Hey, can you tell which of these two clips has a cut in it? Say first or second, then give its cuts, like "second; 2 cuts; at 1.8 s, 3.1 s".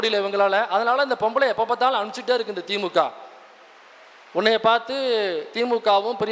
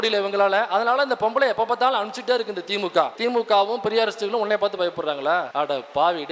second; 2 cuts; at 3.1 s, 5.5 s